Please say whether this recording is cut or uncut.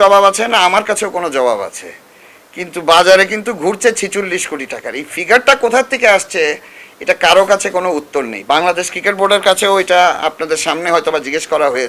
uncut